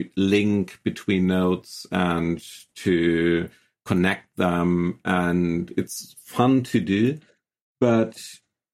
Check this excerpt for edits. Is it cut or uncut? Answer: uncut